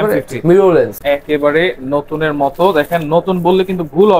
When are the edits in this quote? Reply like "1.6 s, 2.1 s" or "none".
1.0 s